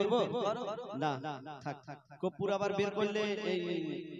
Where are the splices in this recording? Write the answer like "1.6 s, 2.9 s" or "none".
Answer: none